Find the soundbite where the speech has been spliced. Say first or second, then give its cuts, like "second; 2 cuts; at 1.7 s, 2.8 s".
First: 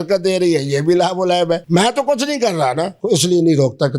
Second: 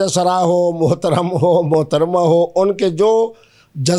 first; 2 cuts; at 1.6 s, 3.0 s